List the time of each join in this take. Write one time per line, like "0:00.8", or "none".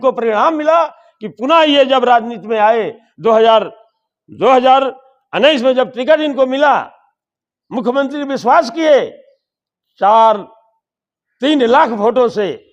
none